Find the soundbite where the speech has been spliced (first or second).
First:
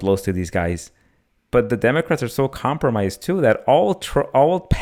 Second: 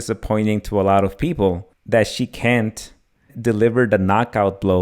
second